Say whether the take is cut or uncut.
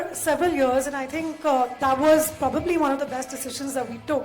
uncut